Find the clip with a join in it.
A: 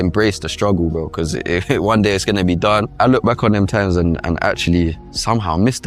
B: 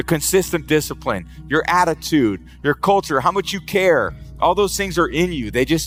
A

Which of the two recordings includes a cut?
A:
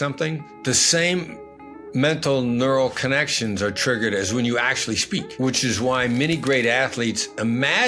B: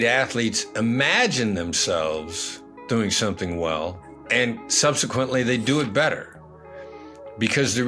A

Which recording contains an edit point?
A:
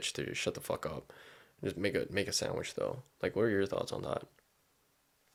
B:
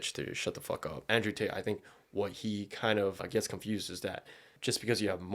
B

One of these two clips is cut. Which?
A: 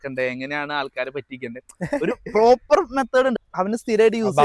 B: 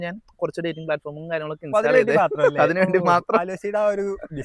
A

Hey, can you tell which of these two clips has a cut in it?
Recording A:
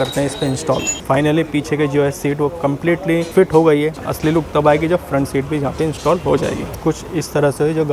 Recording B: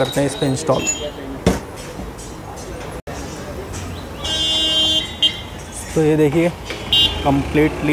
A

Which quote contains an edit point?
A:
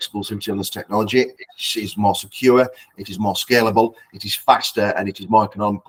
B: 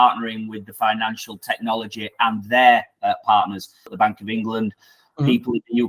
B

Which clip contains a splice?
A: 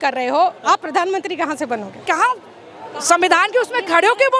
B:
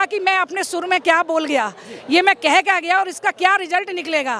A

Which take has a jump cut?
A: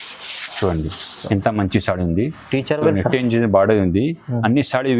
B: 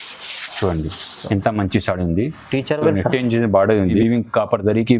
B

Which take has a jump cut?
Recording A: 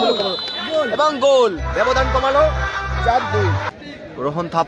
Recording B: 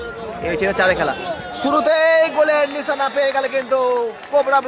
A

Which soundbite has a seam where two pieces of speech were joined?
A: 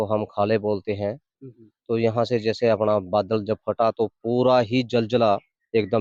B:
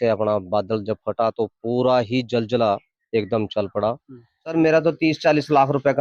B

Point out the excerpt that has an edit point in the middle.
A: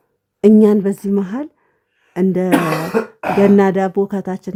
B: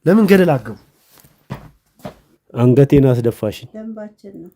B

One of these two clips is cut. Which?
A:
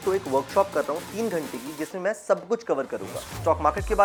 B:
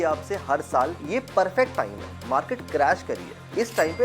B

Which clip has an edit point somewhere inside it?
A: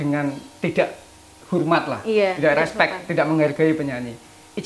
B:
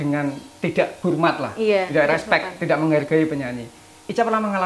B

